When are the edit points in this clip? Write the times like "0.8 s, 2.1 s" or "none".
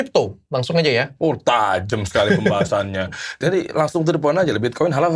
3.4 s